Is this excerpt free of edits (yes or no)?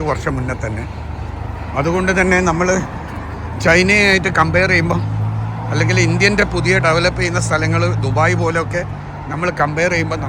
yes